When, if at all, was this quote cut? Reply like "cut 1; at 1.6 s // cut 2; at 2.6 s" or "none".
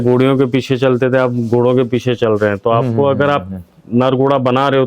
none